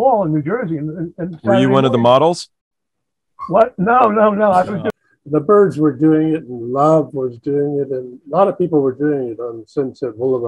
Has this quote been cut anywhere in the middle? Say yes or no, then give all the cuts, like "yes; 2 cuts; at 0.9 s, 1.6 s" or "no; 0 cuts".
yes; 1 cut; at 4.9 s